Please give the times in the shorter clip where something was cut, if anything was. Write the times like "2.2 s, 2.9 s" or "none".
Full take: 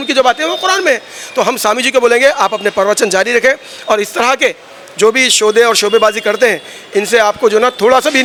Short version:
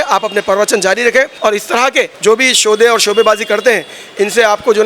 1.6 s